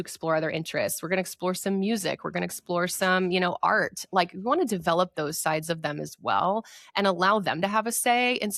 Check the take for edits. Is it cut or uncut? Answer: uncut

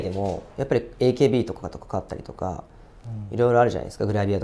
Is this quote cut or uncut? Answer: uncut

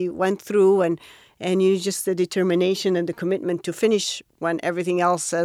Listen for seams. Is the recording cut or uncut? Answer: uncut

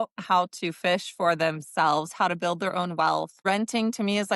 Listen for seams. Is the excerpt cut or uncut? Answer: cut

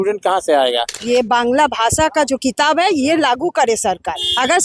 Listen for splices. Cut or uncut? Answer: cut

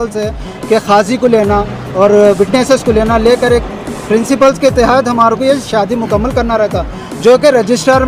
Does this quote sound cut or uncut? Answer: uncut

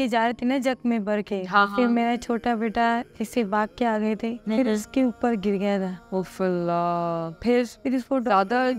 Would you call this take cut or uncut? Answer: cut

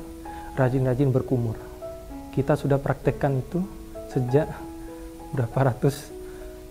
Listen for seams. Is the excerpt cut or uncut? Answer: uncut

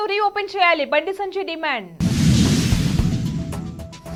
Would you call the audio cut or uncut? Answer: uncut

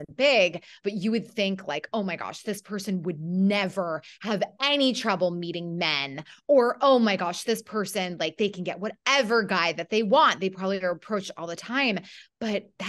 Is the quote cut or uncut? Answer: uncut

